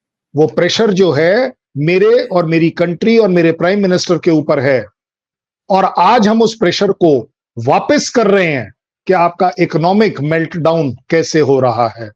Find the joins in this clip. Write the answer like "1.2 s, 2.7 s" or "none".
none